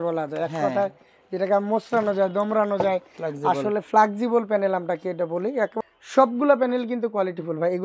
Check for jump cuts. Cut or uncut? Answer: cut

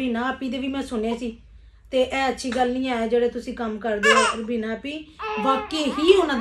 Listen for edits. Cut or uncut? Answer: uncut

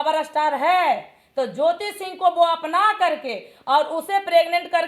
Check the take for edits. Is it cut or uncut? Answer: uncut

